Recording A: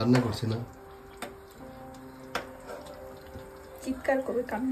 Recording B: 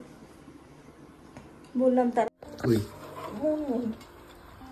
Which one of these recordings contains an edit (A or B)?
B